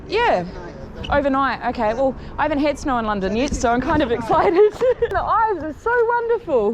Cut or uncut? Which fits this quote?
cut